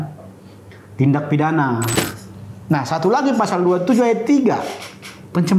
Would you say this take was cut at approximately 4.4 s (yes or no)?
no